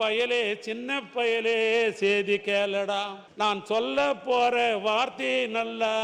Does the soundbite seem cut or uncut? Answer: cut